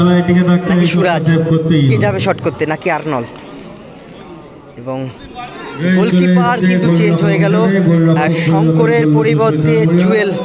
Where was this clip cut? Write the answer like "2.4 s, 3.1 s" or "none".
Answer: 5.5 s